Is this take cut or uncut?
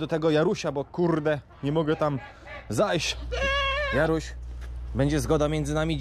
cut